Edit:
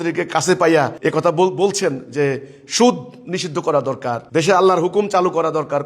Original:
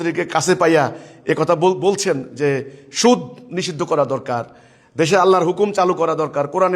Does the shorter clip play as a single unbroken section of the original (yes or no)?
no